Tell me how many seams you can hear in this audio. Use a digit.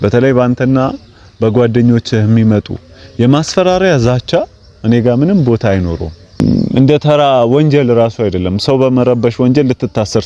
1